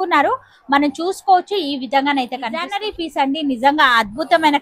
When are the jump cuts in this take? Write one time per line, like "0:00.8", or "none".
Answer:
0:02.7